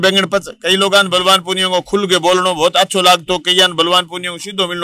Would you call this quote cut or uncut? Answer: uncut